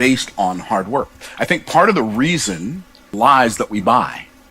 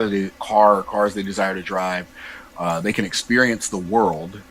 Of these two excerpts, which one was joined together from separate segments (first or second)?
first